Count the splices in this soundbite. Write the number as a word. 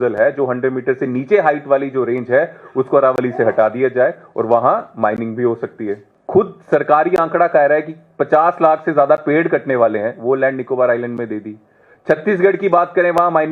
one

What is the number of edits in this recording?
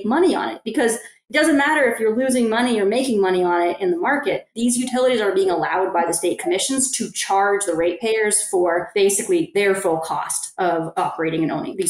two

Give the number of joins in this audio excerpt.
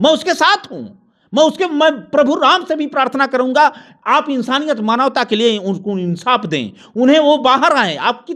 zero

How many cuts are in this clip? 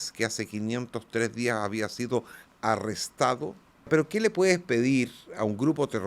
one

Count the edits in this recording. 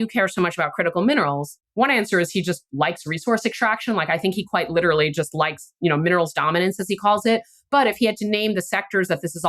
one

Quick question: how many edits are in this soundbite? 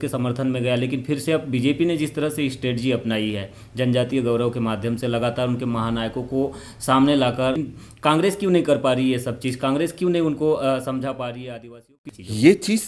one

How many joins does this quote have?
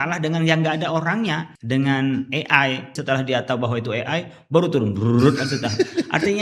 two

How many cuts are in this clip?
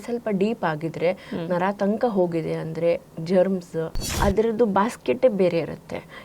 one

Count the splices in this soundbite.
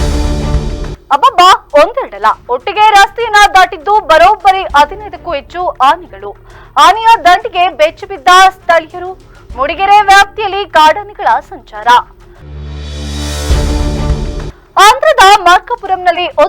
one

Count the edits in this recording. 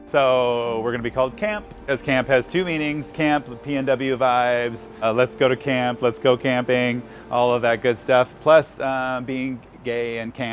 three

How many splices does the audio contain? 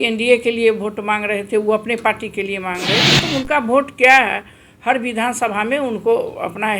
zero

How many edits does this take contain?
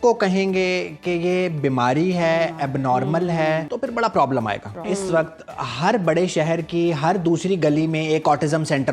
two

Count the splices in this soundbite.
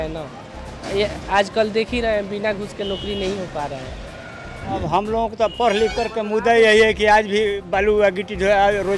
one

